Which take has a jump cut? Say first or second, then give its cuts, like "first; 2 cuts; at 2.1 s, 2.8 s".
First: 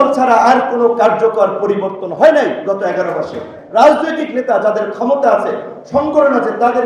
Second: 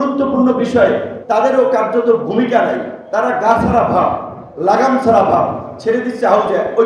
second; 2 cuts; at 1.1 s, 2.9 s